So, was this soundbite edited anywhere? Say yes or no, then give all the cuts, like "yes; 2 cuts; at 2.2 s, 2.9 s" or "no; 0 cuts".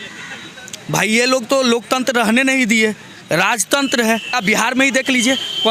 yes; 1 cut; at 4.4 s